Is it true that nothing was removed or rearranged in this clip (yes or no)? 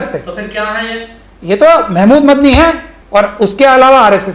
no